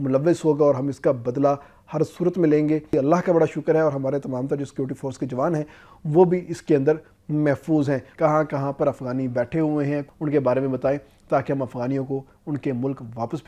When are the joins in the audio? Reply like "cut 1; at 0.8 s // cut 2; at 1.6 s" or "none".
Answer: cut 1; at 2.9 s // cut 2; at 8.1 s // cut 3; at 10.1 s